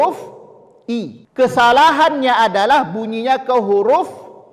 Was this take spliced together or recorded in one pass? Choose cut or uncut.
cut